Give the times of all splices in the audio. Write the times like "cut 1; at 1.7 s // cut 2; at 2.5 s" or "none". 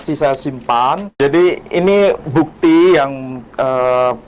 cut 1; at 1.1 s